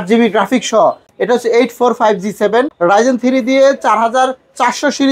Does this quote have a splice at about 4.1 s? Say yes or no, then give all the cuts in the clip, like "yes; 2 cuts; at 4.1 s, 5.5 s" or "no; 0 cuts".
no; 2 cuts; at 1.1 s, 2.7 s